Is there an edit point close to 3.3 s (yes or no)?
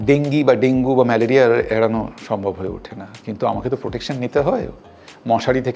no